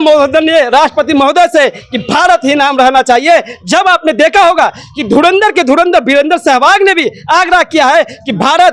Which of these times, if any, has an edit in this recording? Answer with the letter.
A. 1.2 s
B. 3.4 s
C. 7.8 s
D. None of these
D